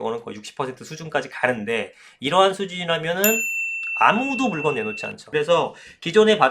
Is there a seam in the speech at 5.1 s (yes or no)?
yes